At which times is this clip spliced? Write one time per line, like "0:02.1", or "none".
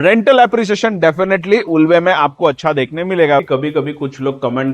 0:03.4

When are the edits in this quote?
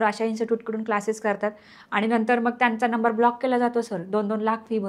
none

